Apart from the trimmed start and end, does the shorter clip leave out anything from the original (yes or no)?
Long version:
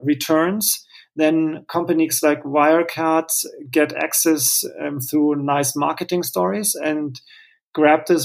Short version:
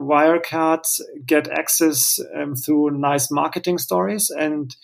no